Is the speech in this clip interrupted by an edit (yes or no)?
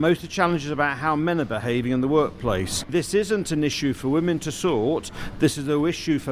yes